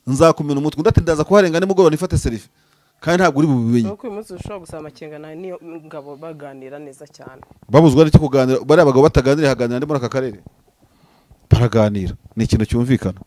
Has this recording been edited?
no; 0 cuts

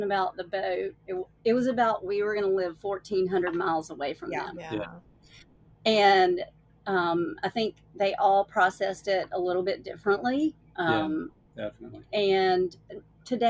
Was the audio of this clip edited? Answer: no; 0 cuts

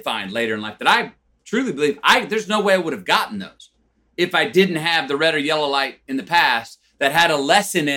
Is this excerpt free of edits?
yes; 0 cuts

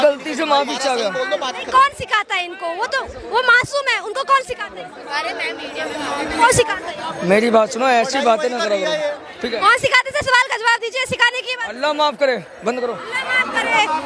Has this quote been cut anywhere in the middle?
no; 0 cuts

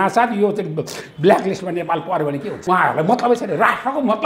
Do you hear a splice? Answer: yes; 1 cut; at 2.5 s

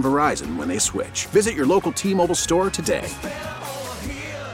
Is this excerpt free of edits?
yes; 0 cuts

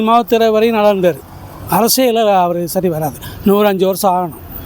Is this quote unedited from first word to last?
yes; 0 cuts

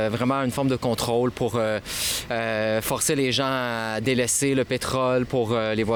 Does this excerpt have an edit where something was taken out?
no; 0 cuts

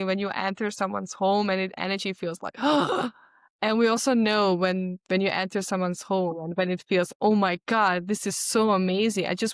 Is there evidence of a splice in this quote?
no; 0 cuts

